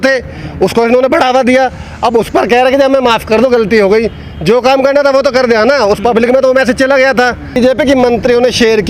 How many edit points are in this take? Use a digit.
1